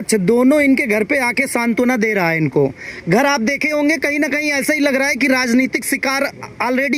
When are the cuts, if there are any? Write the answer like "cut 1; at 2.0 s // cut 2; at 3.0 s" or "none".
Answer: none